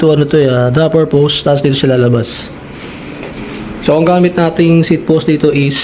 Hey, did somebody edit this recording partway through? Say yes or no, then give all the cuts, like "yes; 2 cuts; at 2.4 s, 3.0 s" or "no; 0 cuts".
yes; 1 cut; at 3.4 s